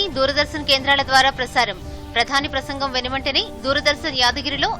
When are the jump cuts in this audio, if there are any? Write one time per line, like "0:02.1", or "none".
none